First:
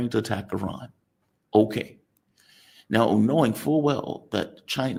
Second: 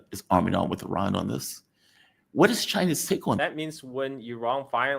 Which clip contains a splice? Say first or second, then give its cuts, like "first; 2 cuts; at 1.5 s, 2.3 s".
second; 1 cut; at 3.4 s